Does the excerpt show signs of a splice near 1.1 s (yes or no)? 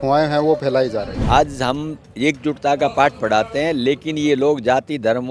yes